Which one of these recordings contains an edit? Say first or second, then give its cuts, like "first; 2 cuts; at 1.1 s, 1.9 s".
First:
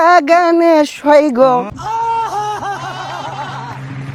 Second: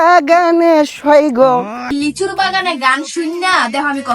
second; 1 cut; at 1.8 s